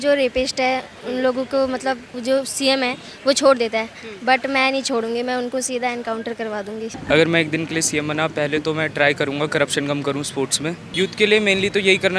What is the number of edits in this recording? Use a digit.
3